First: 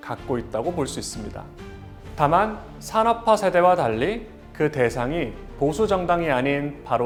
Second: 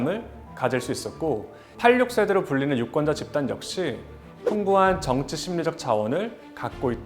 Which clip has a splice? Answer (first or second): second